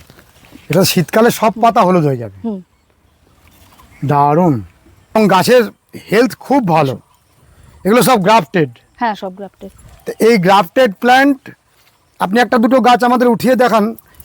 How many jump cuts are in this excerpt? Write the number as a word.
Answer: one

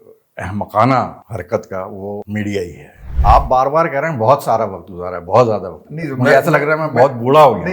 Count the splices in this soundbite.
three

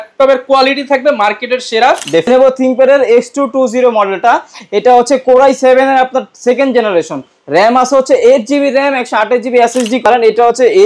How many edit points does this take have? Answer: two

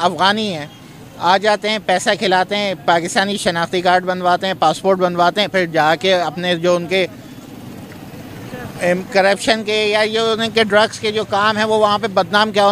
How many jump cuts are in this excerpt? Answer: zero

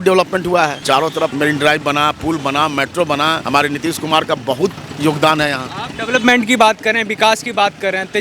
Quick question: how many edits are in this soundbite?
two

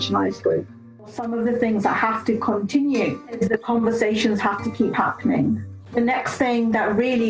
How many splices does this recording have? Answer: three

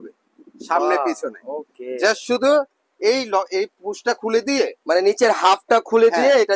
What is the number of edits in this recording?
zero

